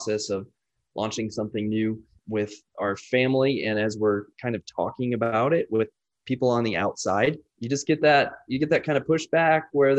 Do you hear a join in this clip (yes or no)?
yes